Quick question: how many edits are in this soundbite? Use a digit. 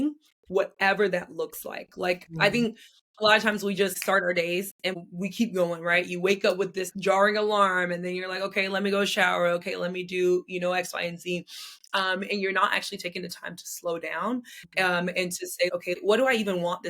4